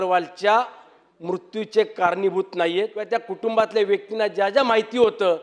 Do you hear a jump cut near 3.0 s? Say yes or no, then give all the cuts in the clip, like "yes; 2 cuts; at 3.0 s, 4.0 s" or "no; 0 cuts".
yes; 1 cut; at 3.0 s